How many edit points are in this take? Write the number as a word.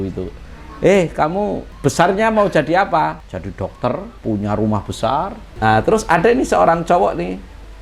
four